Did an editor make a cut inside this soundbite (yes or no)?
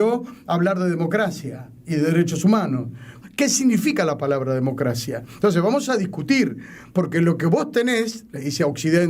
yes